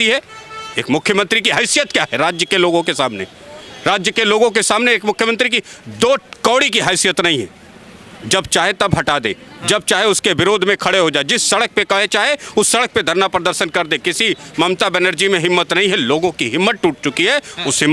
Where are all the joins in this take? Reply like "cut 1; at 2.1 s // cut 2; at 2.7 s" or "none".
none